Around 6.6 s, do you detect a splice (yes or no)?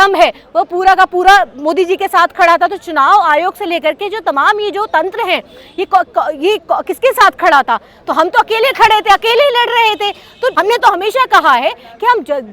no